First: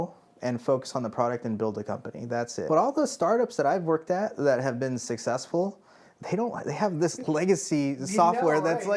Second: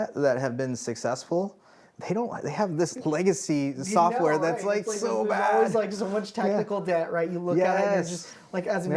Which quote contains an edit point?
first; 1 cut; at 2.7 s

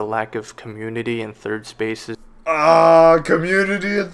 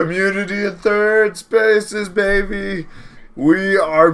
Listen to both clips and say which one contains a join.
first; 1 cut; at 2.2 s

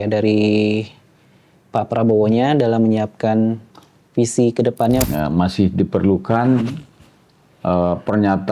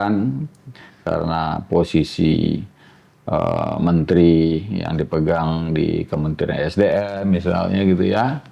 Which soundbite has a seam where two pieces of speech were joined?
first; 1 cut; at 5.0 s

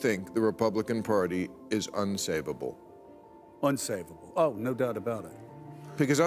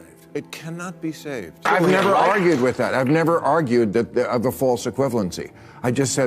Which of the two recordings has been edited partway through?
second; 1 cut; at 1.6 s

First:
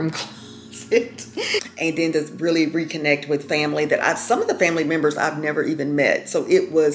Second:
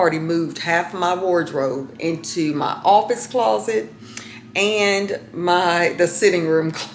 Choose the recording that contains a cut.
first; 1 cut; at 1.7 s

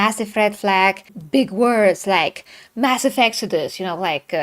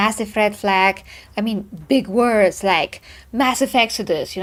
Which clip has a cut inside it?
first; 1 cut; at 1.1 s

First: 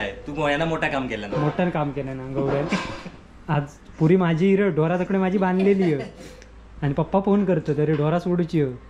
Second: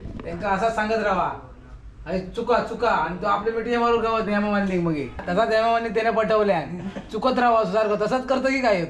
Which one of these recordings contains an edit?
second; 1 cut; at 5.1 s

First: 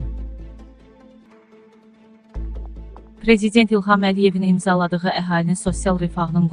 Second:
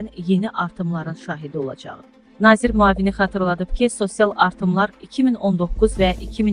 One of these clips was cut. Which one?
first; 2 cuts; at 1.2 s, 3.0 s

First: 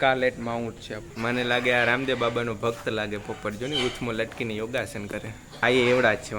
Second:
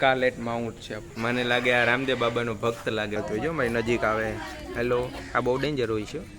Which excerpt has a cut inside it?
second; 1 cut; at 3.2 s

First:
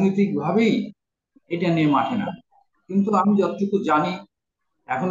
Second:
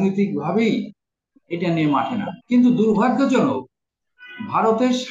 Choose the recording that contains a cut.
second; 1 cut; at 2.4 s

